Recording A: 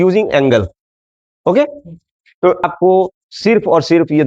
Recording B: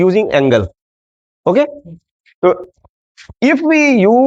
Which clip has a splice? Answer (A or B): A